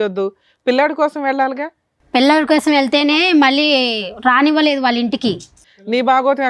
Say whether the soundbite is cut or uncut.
cut